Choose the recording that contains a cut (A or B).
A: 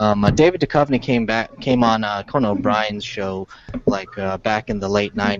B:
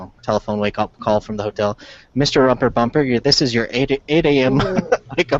A